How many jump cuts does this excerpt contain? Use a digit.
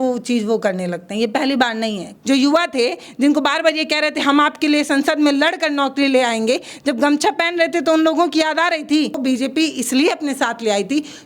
2